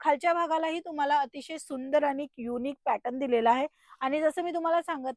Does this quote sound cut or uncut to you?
uncut